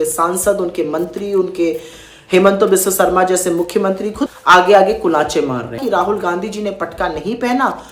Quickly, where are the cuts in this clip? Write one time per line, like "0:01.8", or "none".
0:04.3
0:05.8